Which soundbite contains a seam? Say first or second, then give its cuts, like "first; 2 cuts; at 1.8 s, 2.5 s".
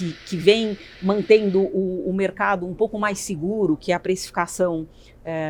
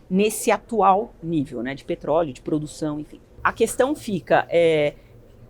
second; 1 cut; at 3.3 s